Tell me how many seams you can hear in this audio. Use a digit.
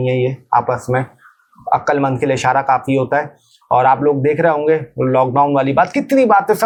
0